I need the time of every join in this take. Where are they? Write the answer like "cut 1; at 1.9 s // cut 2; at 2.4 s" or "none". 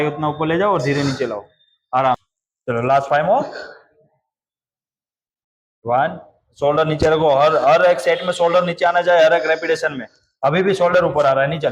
cut 1; at 2.2 s